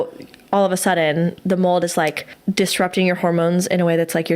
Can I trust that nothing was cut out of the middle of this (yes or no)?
no